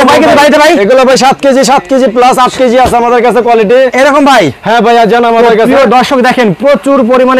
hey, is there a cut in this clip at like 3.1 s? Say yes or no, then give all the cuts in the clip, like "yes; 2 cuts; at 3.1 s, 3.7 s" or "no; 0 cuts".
no; 0 cuts